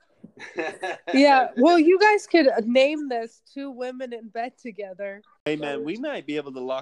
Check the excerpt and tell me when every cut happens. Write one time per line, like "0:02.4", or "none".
0:05.5